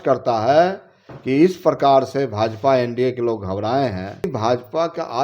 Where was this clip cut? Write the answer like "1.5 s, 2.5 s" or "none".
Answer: 4.3 s